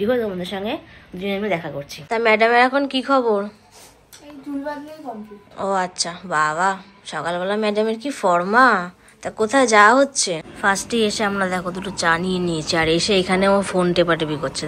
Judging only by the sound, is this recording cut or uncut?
cut